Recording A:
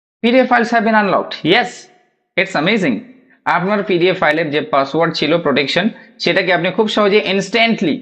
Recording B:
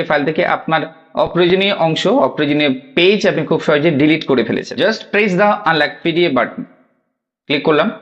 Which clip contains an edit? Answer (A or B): B